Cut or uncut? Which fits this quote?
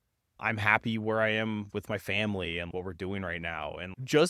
cut